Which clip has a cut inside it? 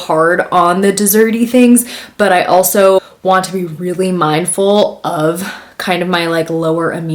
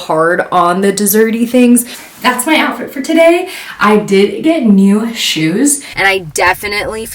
second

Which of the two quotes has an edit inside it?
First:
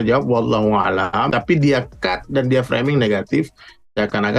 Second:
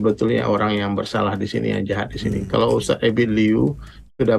first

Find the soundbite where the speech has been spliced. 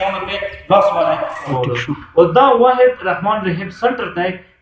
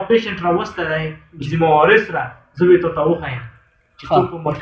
first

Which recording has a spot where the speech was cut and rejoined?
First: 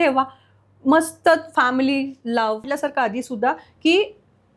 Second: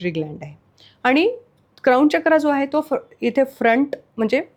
first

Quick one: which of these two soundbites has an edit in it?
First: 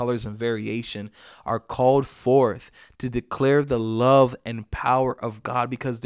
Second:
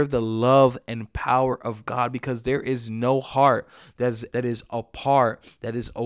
second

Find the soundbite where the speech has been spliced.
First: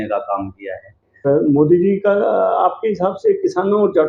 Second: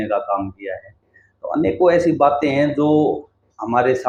first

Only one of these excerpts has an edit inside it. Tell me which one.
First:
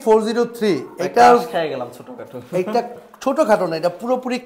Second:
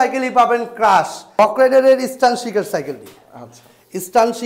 second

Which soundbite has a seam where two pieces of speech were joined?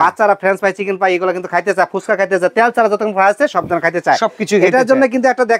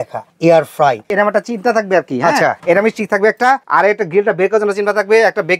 second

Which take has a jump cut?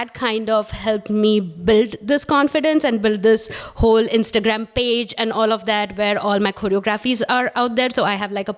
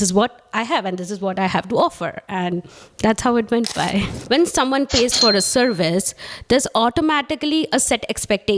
second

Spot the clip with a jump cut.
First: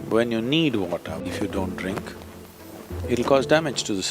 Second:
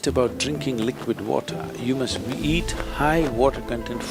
first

